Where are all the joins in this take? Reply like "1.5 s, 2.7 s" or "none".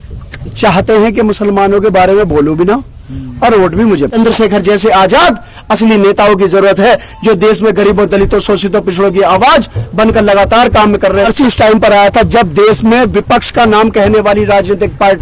4.1 s, 11.2 s